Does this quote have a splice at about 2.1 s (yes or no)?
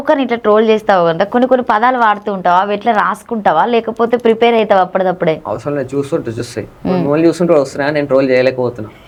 no